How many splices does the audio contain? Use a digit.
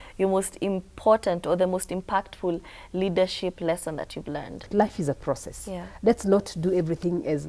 1